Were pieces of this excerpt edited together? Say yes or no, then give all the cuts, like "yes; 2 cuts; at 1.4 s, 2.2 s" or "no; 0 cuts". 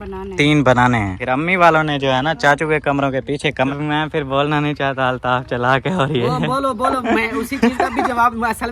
yes; 2 cuts; at 1.1 s, 3.7 s